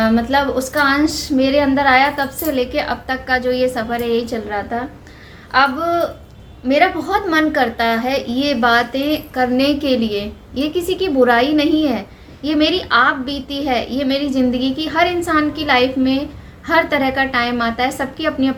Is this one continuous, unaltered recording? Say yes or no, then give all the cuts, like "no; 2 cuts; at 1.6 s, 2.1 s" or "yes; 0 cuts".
yes; 0 cuts